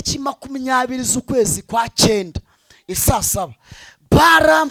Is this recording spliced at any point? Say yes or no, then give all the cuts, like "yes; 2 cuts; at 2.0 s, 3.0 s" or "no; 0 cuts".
no; 0 cuts